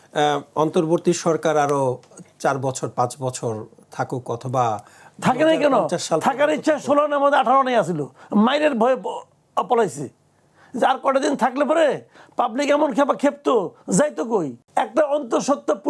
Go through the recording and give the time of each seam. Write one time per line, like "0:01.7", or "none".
0:14.6